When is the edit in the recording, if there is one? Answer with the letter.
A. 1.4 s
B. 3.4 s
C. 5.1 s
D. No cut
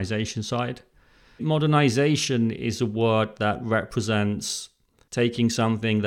A